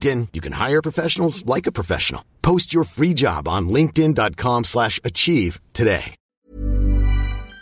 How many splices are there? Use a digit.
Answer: 1